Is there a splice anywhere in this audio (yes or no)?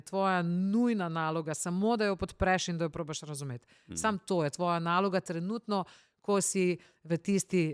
no